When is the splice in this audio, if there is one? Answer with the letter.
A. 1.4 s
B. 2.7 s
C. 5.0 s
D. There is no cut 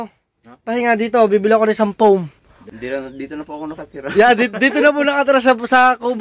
B